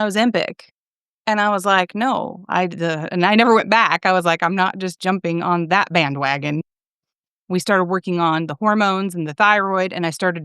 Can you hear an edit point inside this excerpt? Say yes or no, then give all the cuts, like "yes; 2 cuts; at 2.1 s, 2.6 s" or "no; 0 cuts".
yes; 1 cut; at 7.4 s